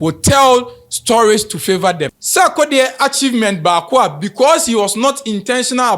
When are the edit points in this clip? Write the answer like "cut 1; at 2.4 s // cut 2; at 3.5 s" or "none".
cut 1; at 2.1 s

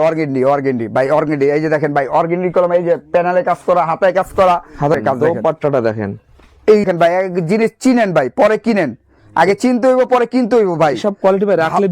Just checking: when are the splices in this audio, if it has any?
cut 1; at 4.9 s // cut 2; at 6.9 s

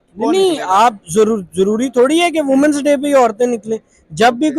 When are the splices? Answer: none

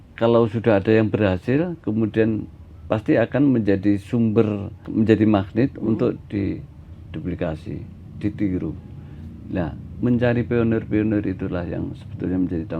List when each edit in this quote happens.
cut 1; at 4.8 s

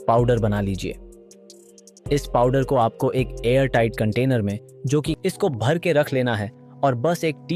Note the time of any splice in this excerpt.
cut 1; at 5.1 s

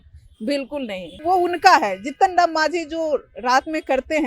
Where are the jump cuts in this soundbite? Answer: cut 1; at 1.2 s

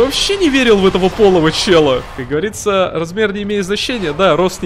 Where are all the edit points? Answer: cut 1; at 2.2 s

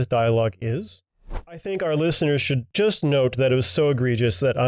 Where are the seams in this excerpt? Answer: cut 1; at 1.0 s // cut 2; at 2.7 s

